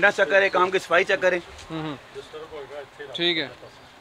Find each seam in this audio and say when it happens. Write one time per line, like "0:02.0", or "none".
none